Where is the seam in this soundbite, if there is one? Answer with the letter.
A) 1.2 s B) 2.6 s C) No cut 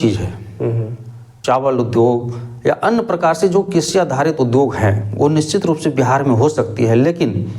A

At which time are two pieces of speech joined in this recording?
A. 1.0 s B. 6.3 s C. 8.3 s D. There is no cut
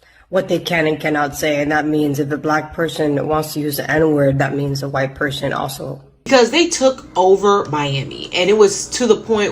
B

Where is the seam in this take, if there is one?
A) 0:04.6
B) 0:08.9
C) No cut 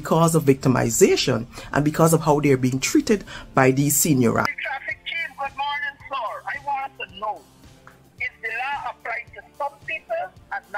A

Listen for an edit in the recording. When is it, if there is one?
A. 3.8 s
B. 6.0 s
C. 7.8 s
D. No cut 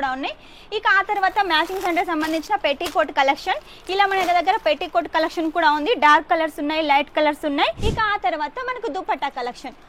C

